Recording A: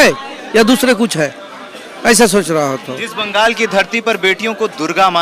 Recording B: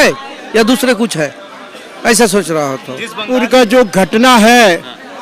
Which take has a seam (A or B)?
B